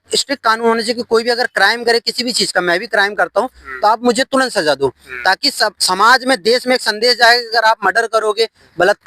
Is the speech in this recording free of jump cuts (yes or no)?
yes